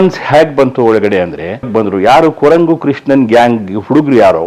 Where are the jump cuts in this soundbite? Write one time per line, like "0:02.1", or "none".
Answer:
0:01.7